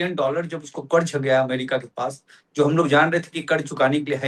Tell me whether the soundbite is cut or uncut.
uncut